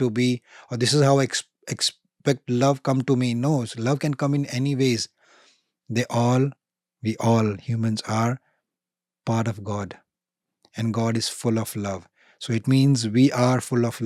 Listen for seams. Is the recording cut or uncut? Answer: uncut